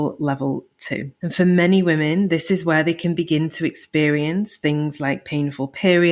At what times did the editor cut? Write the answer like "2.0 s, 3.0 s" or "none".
1.2 s